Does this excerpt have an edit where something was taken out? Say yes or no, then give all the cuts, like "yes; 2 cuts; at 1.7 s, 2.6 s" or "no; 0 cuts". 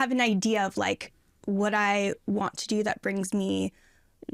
no; 0 cuts